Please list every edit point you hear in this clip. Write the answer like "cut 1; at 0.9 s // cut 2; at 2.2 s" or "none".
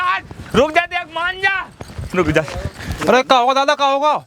cut 1; at 2.9 s